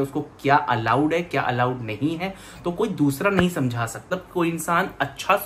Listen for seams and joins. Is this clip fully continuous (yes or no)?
no